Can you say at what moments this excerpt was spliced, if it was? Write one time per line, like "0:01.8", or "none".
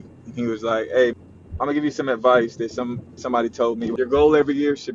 0:03.9